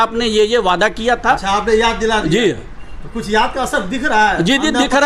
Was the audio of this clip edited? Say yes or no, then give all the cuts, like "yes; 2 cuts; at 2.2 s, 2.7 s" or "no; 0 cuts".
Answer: no; 0 cuts